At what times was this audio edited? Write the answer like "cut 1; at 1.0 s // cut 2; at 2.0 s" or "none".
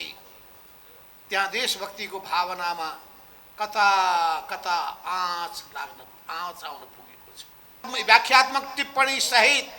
cut 1; at 7.9 s